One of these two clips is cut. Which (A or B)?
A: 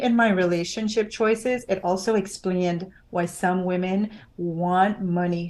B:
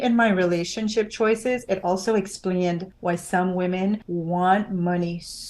B